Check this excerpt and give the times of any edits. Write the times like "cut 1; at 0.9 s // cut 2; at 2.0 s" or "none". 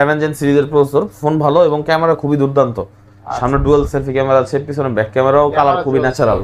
none